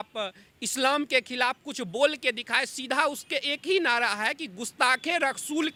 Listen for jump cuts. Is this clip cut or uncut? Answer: uncut